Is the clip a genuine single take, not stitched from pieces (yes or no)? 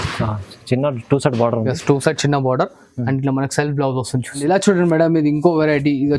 no